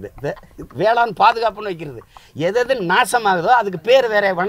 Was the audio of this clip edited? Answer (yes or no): no